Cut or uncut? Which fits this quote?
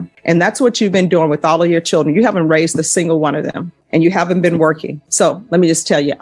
uncut